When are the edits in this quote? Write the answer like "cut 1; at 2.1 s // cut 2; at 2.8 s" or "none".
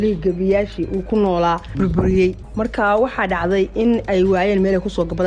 cut 1; at 1.7 s